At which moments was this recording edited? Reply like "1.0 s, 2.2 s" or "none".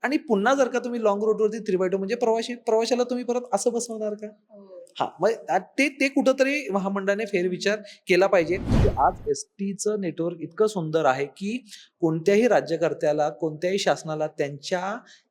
8.8 s